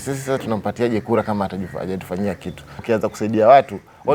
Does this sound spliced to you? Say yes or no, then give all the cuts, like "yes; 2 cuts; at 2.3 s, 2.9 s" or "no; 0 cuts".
yes; 1 cut; at 2.8 s